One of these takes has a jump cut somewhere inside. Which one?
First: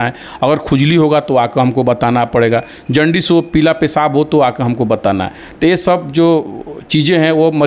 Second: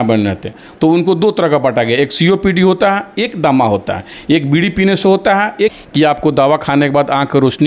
second; 1 cut; at 5.7 s

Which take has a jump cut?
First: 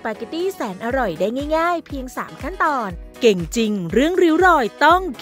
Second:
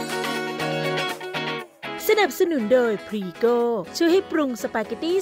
first; 1 cut; at 3.1 s

